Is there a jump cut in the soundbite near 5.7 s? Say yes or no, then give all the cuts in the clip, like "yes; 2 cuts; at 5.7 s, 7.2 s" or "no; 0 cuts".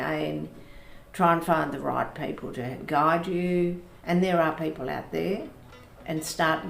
no; 1 cut; at 3.9 s